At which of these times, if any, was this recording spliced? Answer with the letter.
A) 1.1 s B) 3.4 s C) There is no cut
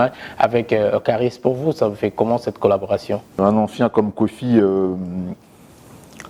B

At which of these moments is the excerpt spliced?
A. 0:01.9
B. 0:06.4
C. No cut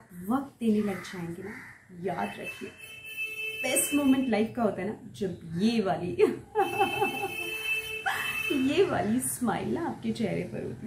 C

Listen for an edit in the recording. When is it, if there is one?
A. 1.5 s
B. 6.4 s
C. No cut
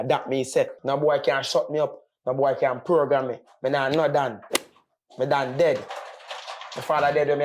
C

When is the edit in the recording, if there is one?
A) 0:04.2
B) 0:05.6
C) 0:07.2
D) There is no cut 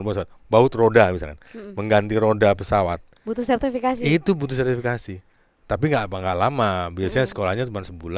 D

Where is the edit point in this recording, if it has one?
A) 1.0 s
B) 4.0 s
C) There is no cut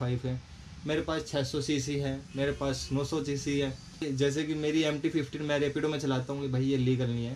B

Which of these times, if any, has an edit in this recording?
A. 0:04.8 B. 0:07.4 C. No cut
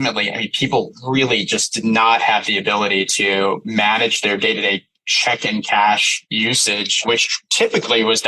B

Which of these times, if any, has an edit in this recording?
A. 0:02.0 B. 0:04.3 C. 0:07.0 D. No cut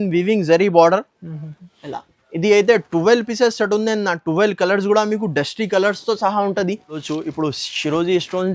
C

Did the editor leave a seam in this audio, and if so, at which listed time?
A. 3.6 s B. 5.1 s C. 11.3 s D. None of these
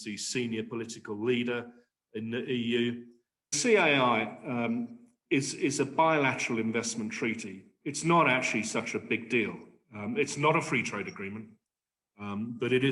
A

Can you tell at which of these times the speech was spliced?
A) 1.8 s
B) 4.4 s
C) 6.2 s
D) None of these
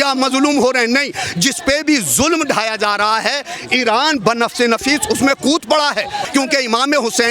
C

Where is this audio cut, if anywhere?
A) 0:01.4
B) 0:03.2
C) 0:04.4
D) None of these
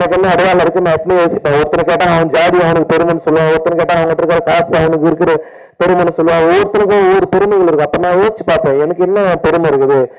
D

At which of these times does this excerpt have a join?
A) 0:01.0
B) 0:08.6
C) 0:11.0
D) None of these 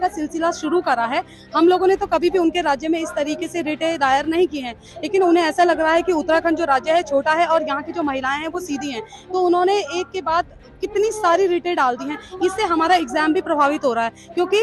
D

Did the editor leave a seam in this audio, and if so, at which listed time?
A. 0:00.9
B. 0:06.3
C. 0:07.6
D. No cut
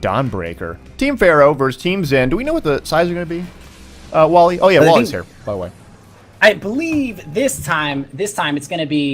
B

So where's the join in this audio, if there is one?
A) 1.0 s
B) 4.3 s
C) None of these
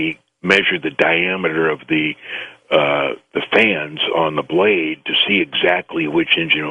C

